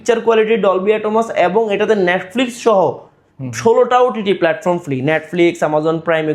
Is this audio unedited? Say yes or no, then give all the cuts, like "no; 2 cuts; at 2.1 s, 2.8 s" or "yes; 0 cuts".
yes; 0 cuts